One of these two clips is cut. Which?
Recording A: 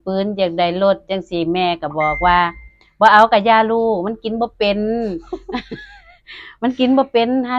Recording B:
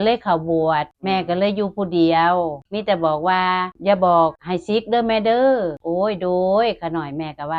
B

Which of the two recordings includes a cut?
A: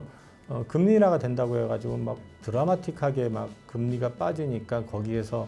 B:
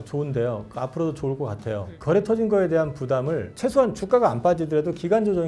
B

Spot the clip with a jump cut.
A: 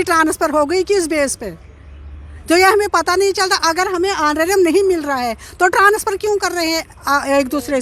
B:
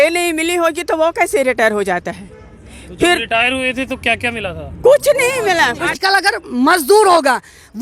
B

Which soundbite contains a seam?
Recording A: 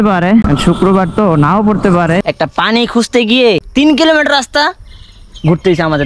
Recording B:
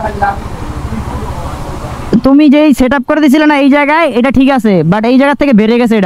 A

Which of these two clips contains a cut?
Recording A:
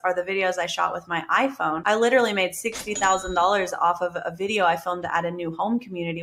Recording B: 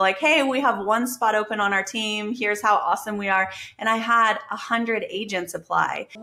A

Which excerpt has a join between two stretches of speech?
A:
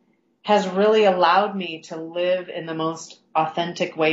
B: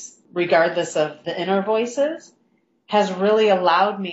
B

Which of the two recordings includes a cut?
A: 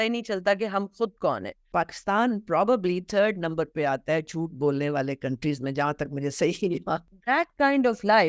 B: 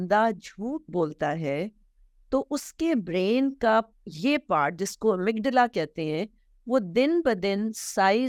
A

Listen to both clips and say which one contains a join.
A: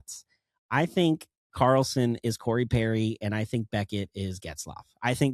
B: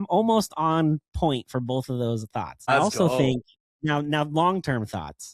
B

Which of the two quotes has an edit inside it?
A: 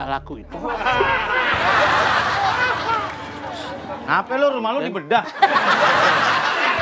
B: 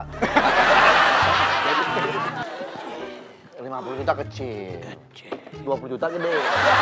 B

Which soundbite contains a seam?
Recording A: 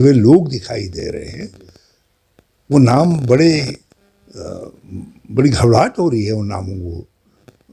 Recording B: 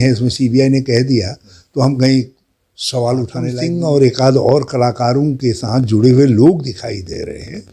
B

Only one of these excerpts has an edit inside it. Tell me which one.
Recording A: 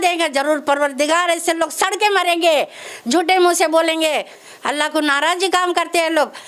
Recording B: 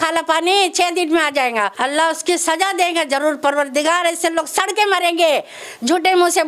B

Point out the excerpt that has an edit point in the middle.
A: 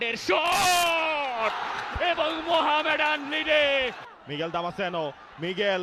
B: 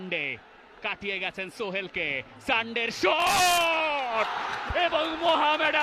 A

